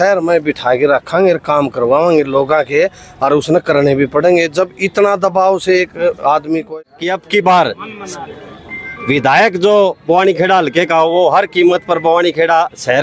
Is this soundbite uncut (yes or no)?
no